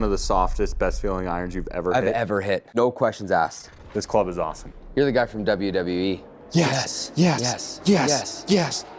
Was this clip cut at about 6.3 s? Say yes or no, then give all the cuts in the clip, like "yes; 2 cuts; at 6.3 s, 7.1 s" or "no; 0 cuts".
yes; 3 cuts; at 2.7 s, 3.6 s, 6.3 s